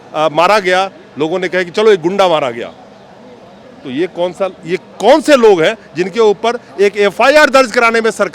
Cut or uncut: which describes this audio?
uncut